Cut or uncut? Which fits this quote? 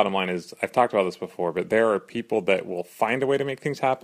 uncut